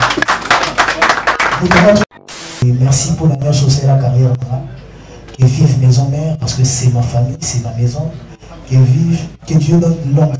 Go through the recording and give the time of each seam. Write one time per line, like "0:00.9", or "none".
0:02.0